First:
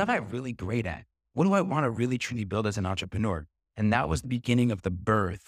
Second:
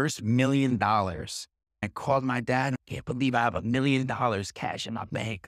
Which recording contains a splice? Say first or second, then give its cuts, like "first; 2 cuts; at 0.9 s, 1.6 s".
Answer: second; 2 cuts; at 1.8 s, 2.8 s